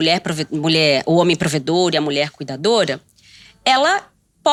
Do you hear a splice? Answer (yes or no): no